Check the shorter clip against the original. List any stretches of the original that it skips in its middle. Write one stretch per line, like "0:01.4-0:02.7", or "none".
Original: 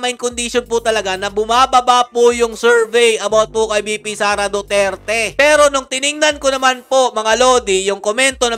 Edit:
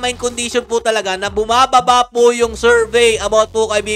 none